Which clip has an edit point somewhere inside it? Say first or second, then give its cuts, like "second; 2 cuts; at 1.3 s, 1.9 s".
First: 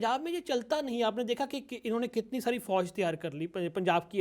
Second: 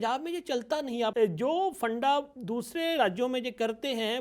second; 1 cut; at 1.1 s